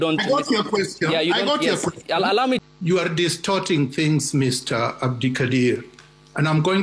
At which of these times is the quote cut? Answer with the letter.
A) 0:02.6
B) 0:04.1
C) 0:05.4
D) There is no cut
A